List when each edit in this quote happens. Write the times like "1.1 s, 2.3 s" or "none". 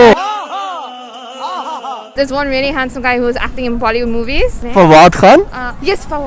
2.1 s, 4.6 s

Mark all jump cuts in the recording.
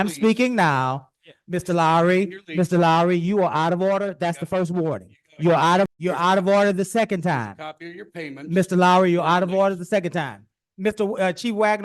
5.9 s

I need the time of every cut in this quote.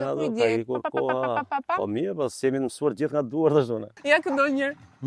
3.9 s

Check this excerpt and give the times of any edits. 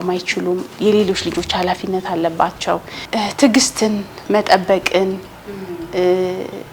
3.0 s

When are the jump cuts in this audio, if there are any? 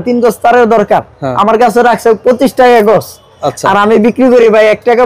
none

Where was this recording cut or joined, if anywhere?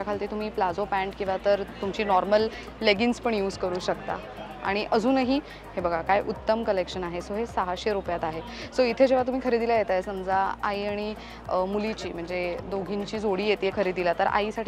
none

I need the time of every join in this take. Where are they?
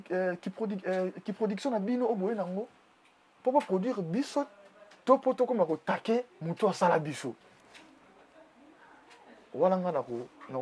none

